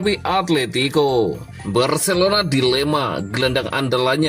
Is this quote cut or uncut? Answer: cut